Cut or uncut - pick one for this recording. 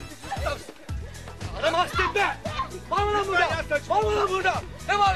uncut